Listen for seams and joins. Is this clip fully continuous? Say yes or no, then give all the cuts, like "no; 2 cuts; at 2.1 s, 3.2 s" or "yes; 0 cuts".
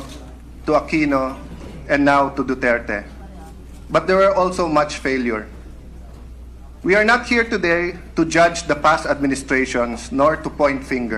yes; 0 cuts